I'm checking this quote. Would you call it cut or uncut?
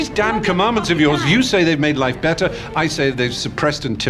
uncut